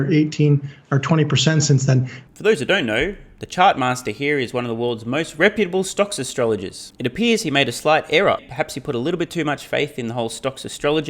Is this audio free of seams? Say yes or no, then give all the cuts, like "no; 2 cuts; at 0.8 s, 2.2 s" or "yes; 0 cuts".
yes; 0 cuts